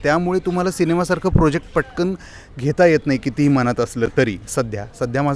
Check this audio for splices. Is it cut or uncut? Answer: uncut